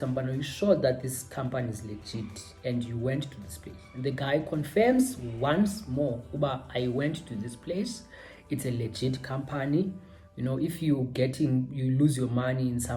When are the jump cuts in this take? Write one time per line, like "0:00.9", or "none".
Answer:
none